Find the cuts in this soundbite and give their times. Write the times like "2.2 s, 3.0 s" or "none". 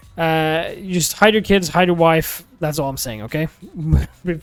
none